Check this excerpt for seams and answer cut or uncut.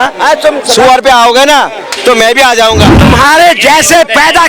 cut